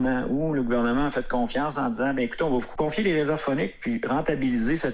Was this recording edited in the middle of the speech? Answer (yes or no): yes